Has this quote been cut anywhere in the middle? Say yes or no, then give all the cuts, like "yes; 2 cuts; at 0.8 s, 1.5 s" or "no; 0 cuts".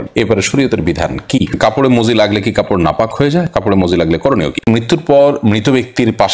yes; 2 cuts; at 1.5 s, 4.6 s